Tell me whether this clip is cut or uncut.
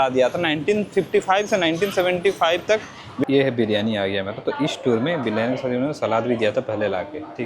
cut